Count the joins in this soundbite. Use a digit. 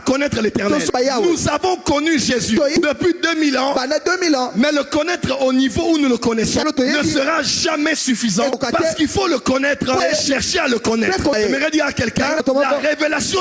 7